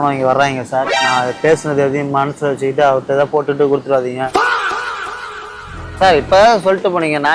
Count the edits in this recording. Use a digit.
2